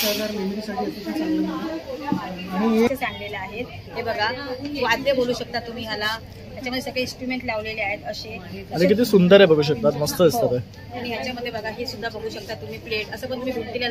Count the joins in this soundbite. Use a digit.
1